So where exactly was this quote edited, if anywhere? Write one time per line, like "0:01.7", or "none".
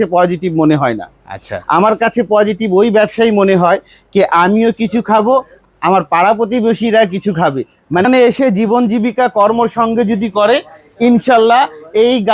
0:08.1